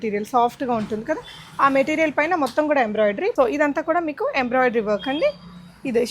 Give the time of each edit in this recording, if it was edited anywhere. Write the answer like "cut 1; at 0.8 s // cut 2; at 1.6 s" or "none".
none